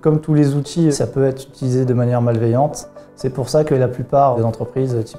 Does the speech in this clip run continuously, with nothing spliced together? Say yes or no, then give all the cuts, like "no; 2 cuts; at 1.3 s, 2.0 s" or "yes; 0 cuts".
no; 2 cuts; at 0.9 s, 4.4 s